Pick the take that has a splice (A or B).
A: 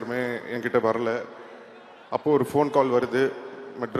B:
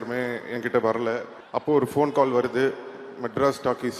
B